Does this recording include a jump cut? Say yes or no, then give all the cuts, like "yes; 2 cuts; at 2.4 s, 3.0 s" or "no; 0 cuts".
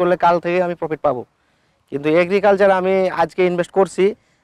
no; 0 cuts